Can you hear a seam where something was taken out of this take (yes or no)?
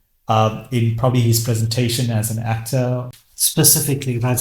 yes